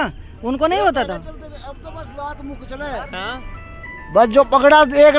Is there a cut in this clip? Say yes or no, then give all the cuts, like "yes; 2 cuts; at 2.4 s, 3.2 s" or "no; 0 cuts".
no; 0 cuts